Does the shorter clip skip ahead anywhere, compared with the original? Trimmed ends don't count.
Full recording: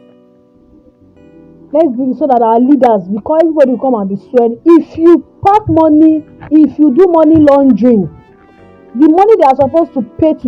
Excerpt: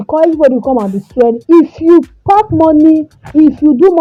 no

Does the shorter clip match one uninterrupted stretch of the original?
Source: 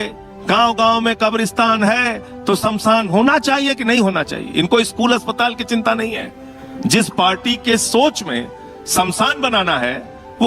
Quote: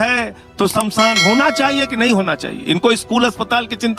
yes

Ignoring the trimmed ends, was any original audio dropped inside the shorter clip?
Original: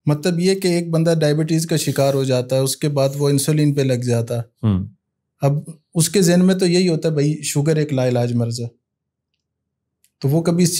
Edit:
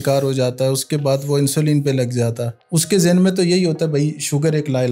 yes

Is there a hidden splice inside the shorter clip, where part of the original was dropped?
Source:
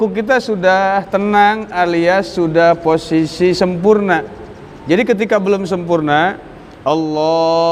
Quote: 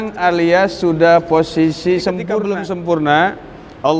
yes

